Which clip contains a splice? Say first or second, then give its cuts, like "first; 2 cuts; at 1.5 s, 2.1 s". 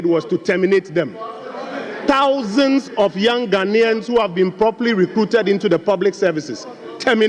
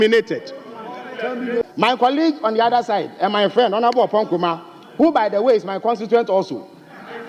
second; 1 cut; at 1.6 s